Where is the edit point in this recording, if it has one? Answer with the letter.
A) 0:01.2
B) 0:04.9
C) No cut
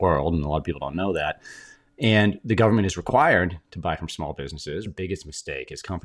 B